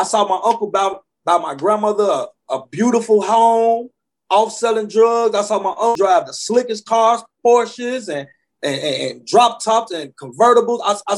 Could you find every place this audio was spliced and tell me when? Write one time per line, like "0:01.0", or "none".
0:06.0